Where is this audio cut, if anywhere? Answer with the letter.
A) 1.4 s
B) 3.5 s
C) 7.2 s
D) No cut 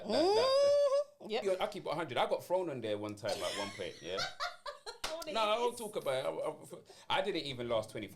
A